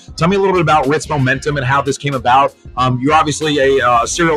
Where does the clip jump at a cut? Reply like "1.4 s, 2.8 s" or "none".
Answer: none